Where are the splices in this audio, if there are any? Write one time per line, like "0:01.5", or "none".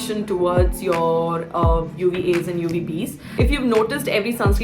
0:03.3

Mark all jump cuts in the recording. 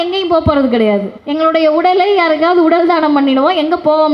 0:01.2

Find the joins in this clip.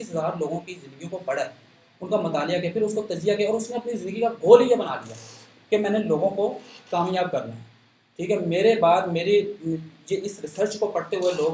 none

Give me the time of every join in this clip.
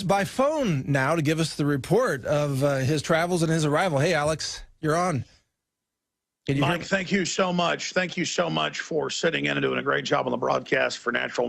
0:06.0

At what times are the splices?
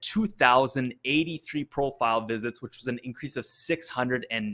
none

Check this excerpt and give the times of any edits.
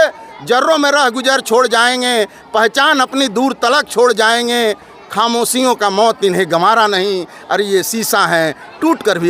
none

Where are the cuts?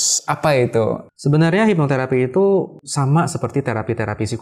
0:01.1
0:02.8

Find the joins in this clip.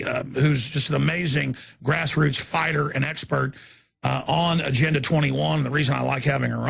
0:02.0

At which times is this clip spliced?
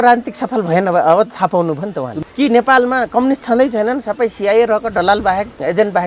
0:02.1

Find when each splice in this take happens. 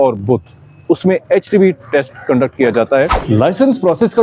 0:03.2

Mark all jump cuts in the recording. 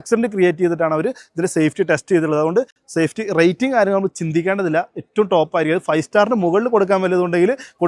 none

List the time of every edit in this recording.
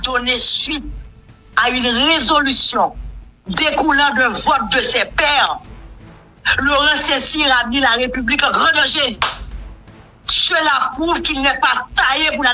none

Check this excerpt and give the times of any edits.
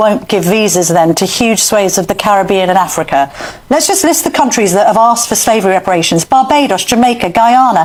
none

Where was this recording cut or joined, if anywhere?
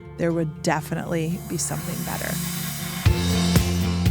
0:02.2

